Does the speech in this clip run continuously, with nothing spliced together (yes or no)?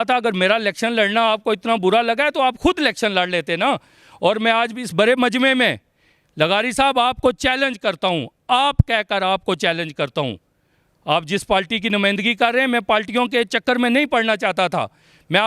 yes